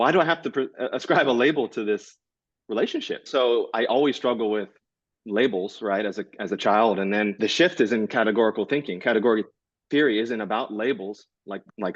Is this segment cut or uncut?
cut